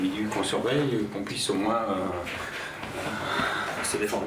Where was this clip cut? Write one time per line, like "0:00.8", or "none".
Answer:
none